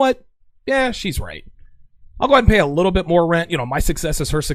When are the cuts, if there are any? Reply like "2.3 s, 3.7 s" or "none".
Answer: none